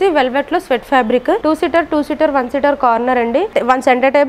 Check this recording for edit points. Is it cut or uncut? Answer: cut